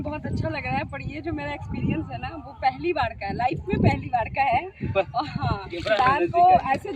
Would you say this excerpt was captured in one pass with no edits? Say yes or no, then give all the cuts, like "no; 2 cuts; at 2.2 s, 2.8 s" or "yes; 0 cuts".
no; 1 cut; at 5.7 s